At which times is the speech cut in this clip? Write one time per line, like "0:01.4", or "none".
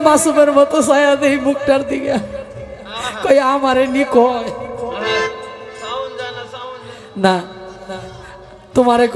none